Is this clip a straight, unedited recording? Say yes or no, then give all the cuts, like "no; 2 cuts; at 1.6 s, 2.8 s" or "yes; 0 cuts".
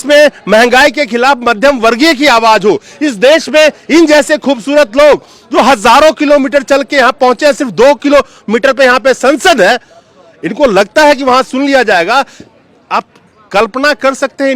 yes; 0 cuts